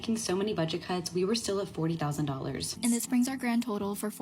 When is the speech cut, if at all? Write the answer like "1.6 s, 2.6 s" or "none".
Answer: 2.7 s